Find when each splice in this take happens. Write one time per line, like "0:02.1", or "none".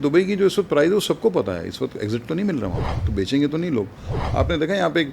0:02.9
0:04.2